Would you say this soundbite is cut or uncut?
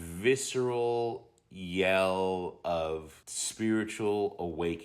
uncut